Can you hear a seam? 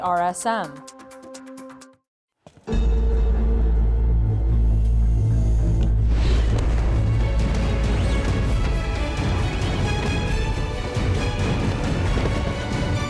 yes; 2 cuts; at 0.7 s, 1.8 s

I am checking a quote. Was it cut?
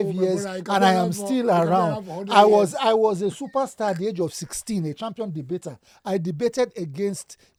no; 0 cuts

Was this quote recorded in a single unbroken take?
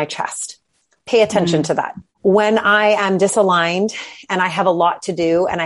no; 1 cut; at 2.0 s

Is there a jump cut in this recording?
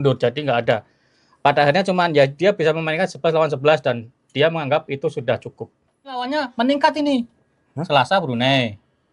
yes; 1 cut; at 6.3 s

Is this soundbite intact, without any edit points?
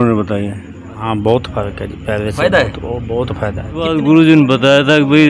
no; 2 cuts; at 1.1 s, 3.6 s

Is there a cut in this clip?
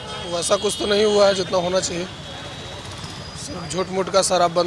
no; 0 cuts

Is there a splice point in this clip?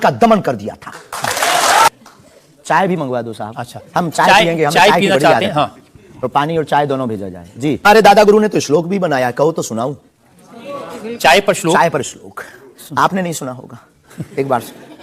yes; 2 cuts; at 1.9 s, 7.9 s

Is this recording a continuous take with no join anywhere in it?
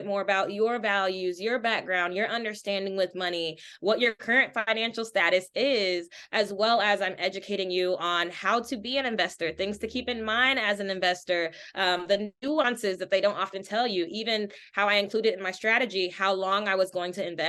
yes; 0 cuts

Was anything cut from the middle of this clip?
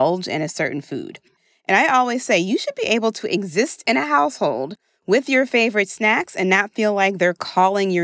yes; 1 cut; at 1.3 s

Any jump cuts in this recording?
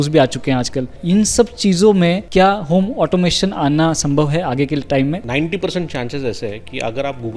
yes; 3 cuts; at 1.0 s, 2.3 s, 5.2 s

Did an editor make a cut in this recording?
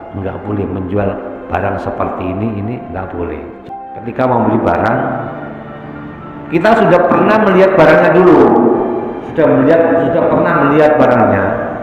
yes; 1 cut; at 3.6 s

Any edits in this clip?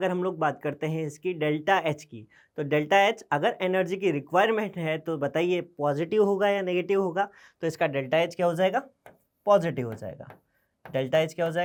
no; 0 cuts

